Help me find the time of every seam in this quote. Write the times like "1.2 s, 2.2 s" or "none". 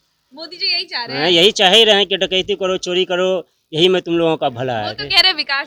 none